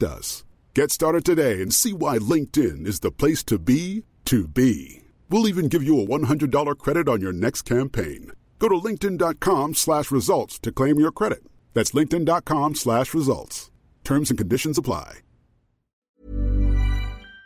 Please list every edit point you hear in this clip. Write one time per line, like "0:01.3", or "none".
0:16.2